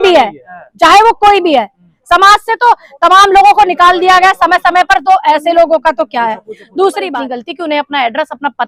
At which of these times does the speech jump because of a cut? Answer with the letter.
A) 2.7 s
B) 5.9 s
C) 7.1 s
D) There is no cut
C